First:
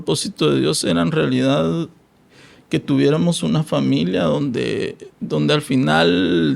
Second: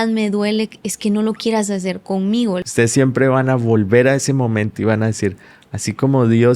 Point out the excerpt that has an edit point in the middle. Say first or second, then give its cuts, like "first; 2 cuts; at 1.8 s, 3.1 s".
second; 1 cut; at 2.7 s